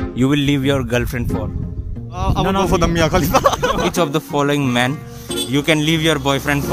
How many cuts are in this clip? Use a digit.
2